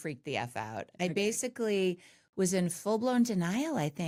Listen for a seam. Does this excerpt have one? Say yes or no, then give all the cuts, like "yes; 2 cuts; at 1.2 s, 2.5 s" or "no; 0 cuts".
no; 0 cuts